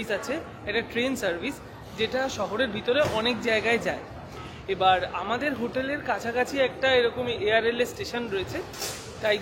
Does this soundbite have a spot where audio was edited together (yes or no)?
no